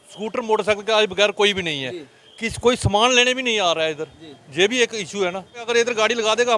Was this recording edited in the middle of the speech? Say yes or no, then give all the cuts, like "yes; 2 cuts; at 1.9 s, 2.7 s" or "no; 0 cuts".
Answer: yes; 1 cut; at 5.6 s